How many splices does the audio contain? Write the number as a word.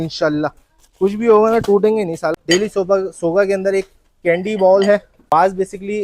two